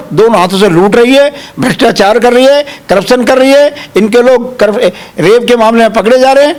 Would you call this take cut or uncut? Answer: uncut